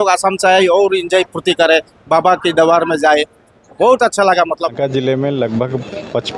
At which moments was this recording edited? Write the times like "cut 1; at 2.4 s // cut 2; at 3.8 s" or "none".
cut 1; at 4.8 s